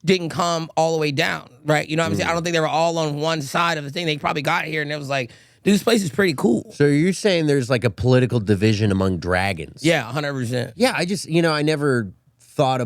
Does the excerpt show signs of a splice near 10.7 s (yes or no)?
yes